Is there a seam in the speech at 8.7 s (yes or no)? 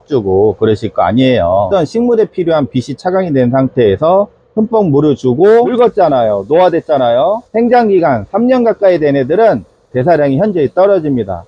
no